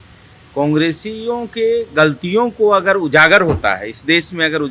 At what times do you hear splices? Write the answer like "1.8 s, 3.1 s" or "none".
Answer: none

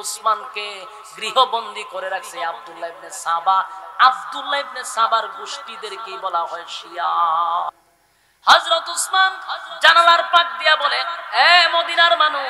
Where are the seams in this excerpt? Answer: 7.7 s

